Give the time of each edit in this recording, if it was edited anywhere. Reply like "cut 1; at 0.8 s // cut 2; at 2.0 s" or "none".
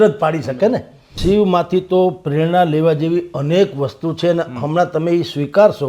cut 1; at 1.1 s